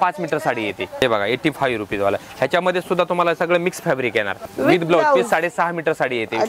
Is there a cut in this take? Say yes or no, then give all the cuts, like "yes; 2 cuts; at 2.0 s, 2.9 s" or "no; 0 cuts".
yes; 2 cuts; at 1.0 s, 4.5 s